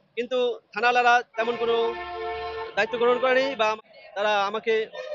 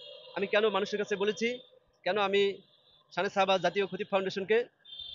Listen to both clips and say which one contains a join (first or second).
first